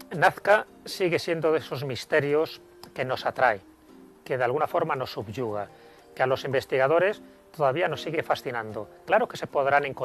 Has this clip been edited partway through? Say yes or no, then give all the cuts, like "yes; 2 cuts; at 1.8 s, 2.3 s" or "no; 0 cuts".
yes; 1 cut; at 2.2 s